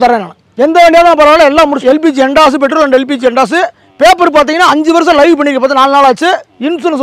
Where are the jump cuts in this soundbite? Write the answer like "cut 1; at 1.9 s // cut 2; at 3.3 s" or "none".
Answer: cut 1; at 1.8 s

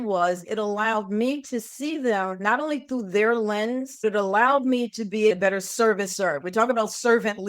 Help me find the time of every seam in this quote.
cut 1; at 4.0 s // cut 2; at 5.3 s

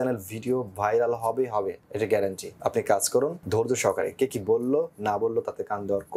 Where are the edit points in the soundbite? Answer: cut 1; at 1.8 s // cut 2; at 2.5 s // cut 3; at 3.4 s

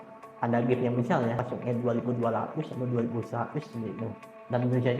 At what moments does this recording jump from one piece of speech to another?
cut 1; at 1.4 s

